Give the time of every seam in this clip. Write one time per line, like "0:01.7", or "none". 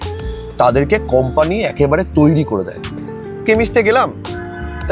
0:03.0